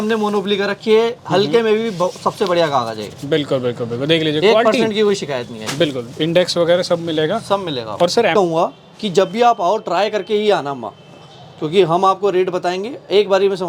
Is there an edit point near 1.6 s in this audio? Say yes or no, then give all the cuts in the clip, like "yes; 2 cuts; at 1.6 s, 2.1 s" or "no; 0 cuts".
no; 1 cut; at 8.3 s